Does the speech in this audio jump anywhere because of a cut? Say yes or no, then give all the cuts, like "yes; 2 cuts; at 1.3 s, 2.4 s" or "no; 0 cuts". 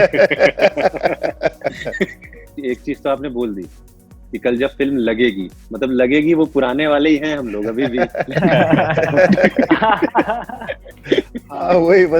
yes; 1 cut; at 2.5 s